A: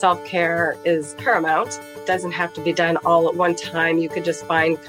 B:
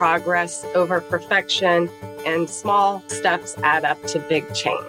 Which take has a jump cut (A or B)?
A